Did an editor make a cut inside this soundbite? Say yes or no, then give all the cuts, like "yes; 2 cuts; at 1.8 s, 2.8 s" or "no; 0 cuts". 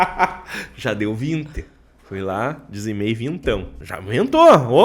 yes; 1 cut; at 3.8 s